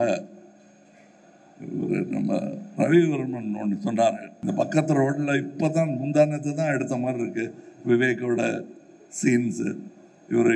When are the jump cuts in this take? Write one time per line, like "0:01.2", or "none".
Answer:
0:04.3